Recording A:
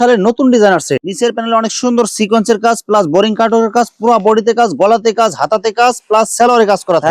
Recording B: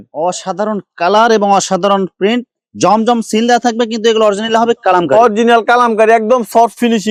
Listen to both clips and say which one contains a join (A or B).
A